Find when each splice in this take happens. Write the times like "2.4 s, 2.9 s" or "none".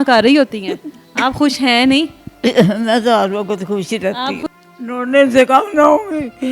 2.2 s, 4.4 s